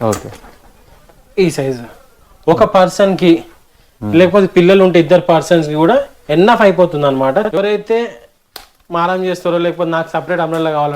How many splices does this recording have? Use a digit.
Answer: 1